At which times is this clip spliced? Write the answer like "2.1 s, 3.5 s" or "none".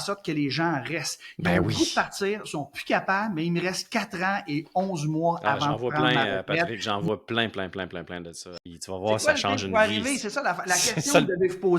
8.4 s